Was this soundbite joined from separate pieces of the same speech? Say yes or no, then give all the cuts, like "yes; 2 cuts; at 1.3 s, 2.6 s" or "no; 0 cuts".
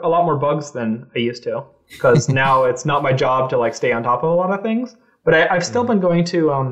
no; 0 cuts